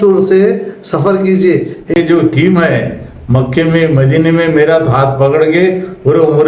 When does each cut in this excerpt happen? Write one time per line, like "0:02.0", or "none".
0:01.9